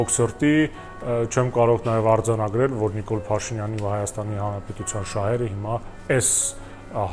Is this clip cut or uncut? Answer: uncut